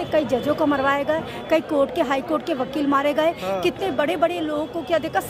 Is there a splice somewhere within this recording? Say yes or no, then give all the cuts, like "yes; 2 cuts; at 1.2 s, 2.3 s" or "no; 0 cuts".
no; 0 cuts